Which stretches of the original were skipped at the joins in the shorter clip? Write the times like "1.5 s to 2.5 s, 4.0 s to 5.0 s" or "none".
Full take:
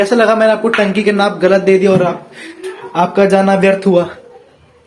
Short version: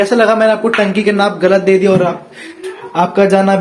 none

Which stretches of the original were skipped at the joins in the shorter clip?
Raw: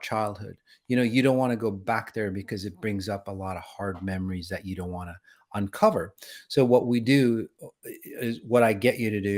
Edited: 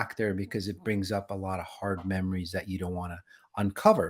none

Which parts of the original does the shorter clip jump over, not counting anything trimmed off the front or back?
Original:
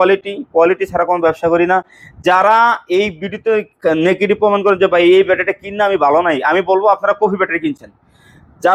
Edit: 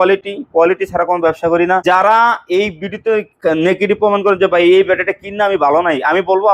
1.8 s to 2.2 s

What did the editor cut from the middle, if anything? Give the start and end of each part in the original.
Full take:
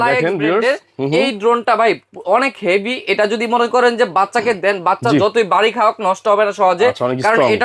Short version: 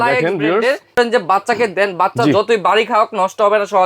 1.0 s to 3.8 s

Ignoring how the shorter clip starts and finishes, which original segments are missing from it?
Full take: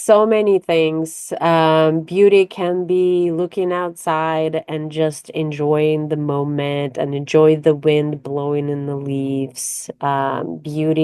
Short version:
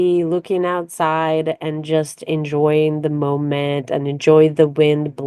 none

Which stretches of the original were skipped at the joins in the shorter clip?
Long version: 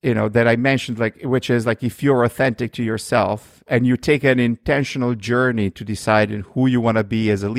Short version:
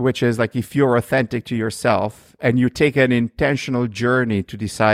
none

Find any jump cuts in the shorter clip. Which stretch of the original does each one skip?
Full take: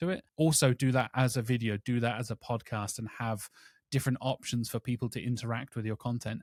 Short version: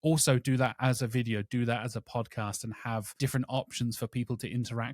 3.5 s to 3.8 s

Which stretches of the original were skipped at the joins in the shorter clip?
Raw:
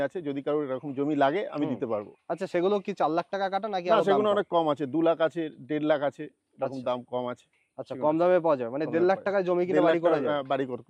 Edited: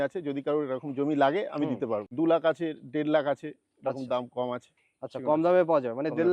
2.1 s to 4.9 s

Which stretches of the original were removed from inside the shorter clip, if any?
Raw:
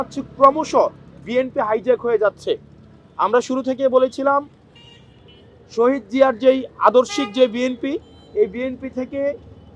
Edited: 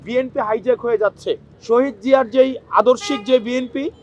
2.7 s to 5.6 s

